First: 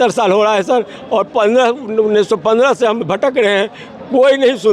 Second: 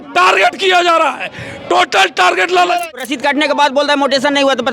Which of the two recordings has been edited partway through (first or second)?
second